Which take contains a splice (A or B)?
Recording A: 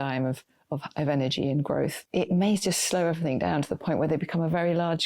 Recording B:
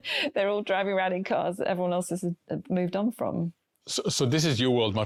A